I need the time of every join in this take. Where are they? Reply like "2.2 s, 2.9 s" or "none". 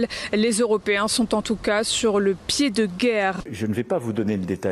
3.4 s